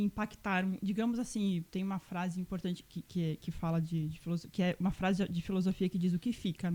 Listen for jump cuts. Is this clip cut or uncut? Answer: uncut